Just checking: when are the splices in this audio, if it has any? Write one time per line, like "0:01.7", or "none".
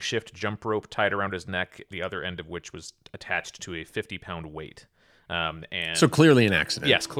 none